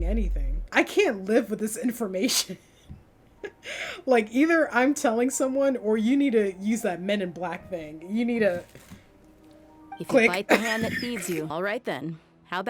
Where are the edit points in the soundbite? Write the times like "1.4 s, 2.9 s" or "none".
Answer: none